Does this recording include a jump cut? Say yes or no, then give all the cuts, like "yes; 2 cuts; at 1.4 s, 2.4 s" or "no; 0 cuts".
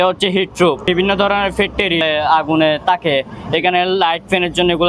yes; 2 cuts; at 0.8 s, 2.0 s